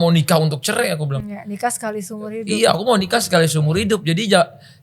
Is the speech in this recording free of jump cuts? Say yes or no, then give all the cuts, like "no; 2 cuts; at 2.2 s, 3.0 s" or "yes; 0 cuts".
yes; 0 cuts